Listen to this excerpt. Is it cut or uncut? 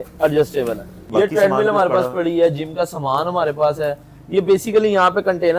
cut